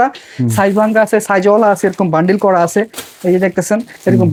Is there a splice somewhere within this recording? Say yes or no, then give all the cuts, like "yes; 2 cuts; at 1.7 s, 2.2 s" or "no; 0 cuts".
no; 0 cuts